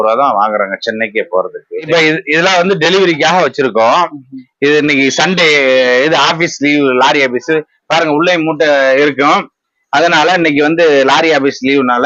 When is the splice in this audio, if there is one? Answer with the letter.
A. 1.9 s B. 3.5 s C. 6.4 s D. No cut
A